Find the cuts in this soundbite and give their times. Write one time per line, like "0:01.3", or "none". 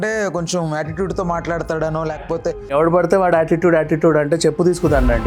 0:02.7

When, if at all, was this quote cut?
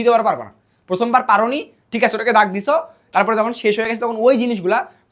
none

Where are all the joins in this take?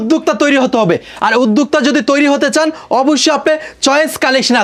none

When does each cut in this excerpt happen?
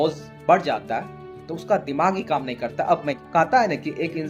0:03.2

